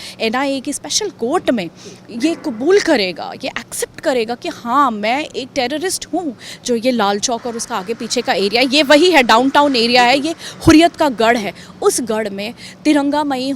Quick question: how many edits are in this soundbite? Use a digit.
1